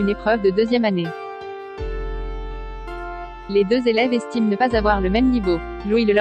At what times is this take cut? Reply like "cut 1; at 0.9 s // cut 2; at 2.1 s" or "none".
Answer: cut 1; at 1.1 s // cut 2; at 3.4 s

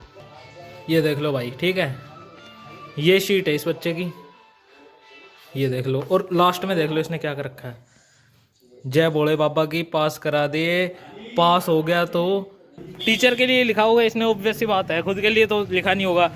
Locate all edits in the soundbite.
cut 1; at 12.9 s

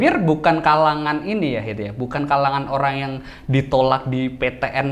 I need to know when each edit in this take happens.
none

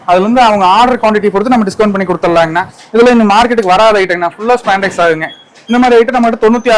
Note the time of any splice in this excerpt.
cut 1; at 2.8 s

